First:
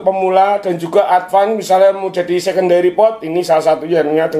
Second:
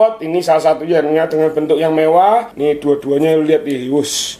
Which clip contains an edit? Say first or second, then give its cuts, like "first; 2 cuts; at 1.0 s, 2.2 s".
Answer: second; 1 cut; at 2.5 s